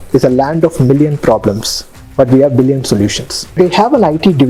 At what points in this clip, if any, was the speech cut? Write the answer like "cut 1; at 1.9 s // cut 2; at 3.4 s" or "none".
cut 1; at 3.6 s